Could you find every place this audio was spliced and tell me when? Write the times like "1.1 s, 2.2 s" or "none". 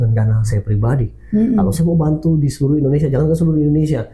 none

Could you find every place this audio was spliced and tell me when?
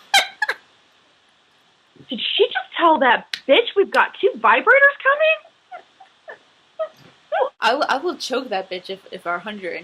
7.5 s

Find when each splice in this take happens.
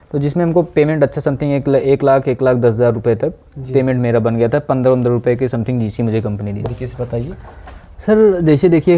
6.7 s

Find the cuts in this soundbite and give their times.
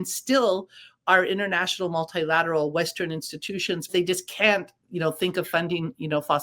3.9 s

